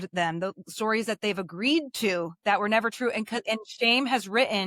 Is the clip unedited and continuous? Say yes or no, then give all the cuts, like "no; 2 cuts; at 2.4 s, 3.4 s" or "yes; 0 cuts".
yes; 0 cuts